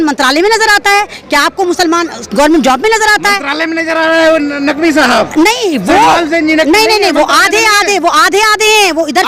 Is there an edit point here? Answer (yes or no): no